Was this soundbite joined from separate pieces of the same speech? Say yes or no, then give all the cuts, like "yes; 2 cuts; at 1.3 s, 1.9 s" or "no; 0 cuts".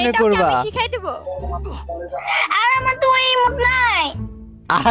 no; 0 cuts